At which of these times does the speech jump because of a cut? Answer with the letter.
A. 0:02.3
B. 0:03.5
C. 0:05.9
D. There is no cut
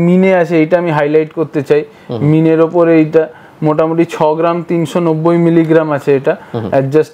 D